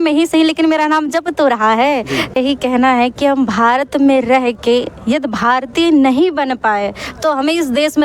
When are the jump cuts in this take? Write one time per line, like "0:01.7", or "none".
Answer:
0:02.4